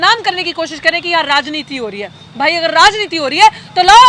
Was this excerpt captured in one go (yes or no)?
yes